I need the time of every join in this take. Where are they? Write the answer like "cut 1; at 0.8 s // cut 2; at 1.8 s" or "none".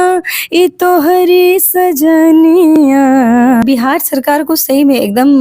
cut 1; at 3.6 s